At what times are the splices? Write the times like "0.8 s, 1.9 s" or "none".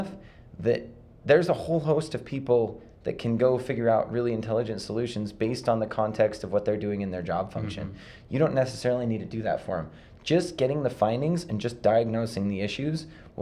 none